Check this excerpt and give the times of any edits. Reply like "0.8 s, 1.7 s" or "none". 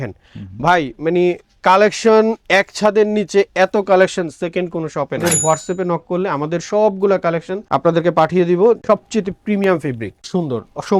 5.2 s, 8.8 s, 10.1 s